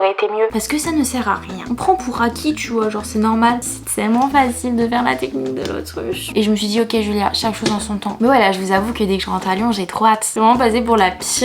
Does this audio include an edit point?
yes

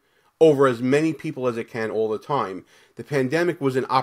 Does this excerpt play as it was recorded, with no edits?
yes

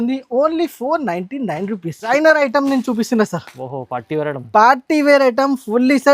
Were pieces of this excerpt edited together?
yes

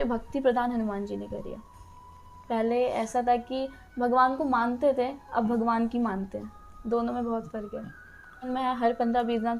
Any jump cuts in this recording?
yes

